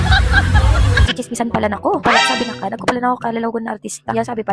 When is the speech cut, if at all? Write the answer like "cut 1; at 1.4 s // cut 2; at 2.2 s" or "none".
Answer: cut 1; at 1.1 s